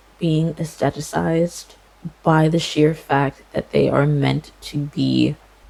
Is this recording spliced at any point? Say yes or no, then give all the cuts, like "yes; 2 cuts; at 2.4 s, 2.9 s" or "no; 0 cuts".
no; 0 cuts